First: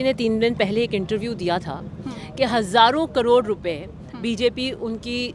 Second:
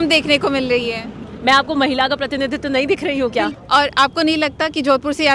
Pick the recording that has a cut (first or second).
second